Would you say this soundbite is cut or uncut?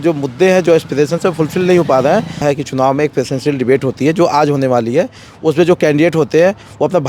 cut